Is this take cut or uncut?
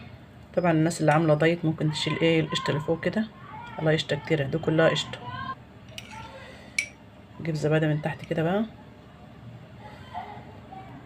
cut